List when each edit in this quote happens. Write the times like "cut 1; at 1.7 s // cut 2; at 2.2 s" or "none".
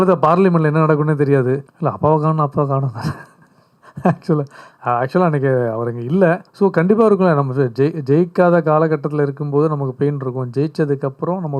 cut 1; at 1.7 s // cut 2; at 6.5 s